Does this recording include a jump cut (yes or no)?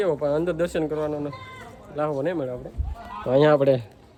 no